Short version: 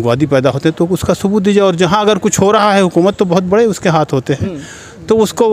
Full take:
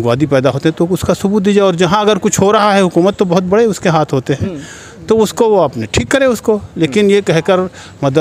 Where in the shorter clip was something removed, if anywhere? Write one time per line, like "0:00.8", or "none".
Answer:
none